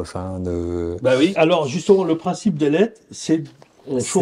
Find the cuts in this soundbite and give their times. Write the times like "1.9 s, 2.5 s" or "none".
1.3 s

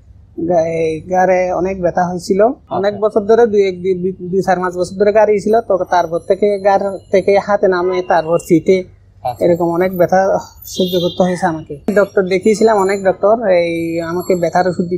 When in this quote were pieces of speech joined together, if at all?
2.7 s, 11.9 s

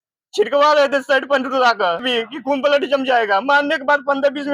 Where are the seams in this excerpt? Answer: 2.1 s

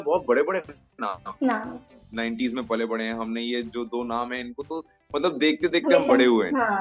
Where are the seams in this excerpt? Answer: 2.0 s

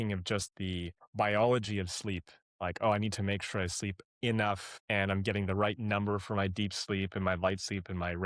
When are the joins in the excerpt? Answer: 1.0 s, 4.7 s

